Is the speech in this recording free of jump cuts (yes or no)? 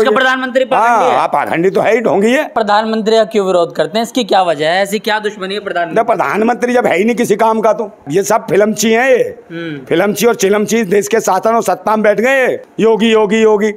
no